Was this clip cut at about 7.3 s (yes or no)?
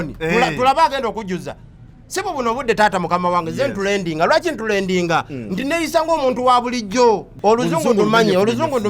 yes